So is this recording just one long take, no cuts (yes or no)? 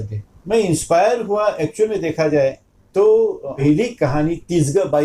no